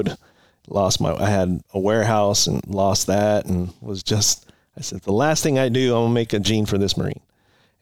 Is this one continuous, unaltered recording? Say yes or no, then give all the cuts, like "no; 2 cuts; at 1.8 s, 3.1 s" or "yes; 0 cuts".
yes; 0 cuts